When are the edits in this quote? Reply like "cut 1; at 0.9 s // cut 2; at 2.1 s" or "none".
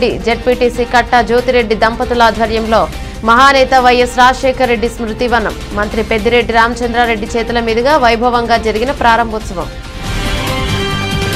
cut 1; at 9.8 s